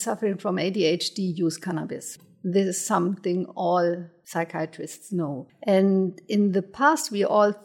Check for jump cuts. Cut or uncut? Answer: cut